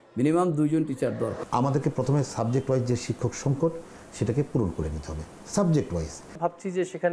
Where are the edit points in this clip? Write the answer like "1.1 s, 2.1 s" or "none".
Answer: 1.4 s, 6.2 s